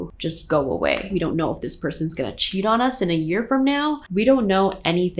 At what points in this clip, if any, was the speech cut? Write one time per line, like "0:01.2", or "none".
0:01.1